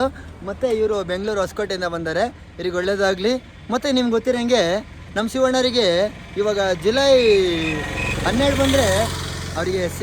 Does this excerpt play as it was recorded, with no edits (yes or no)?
yes